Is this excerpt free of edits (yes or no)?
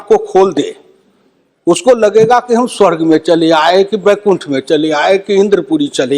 yes